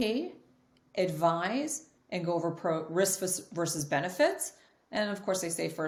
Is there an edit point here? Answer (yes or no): no